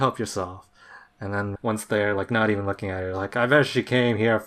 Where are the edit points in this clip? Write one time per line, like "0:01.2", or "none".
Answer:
0:01.5